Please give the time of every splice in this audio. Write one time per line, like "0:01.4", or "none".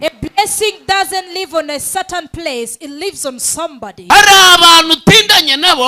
0:04.0